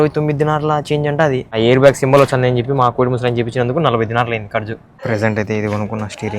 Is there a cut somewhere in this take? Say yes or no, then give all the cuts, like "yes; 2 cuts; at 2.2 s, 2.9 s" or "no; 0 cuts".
yes; 2 cuts; at 1.6 s, 4.9 s